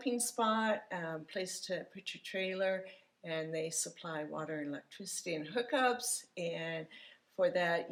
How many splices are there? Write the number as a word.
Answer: zero